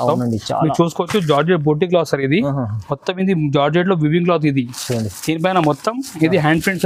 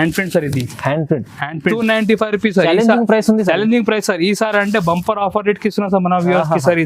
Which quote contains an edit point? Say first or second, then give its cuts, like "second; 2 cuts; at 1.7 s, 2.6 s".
second; 1 cut; at 1.7 s